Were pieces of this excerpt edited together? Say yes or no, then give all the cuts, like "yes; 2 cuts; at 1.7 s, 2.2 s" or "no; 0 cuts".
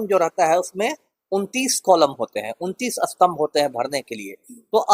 no; 0 cuts